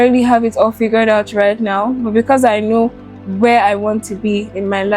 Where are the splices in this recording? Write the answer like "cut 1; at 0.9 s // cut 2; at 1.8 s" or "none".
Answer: none